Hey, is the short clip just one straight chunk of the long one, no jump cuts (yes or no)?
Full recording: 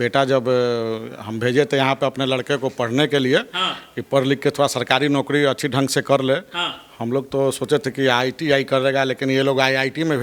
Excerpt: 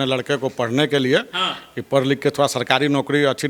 yes